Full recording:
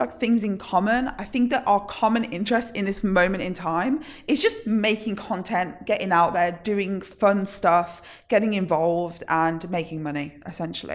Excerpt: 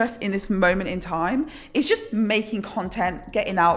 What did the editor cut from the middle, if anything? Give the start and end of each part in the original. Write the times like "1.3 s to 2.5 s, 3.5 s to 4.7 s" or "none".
none